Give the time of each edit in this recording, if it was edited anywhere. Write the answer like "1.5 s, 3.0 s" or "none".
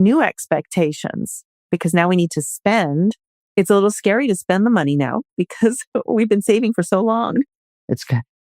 3.3 s